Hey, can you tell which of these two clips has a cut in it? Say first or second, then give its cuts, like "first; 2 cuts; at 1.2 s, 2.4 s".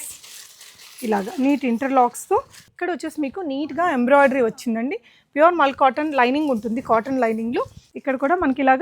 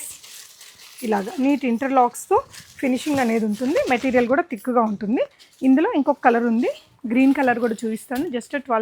first; 2 cuts; at 2.7 s, 7.8 s